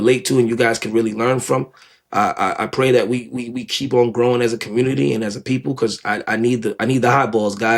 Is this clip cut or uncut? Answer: uncut